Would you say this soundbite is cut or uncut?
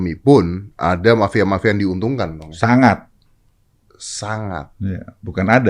uncut